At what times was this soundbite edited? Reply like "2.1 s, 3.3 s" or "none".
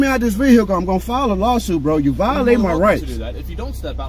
none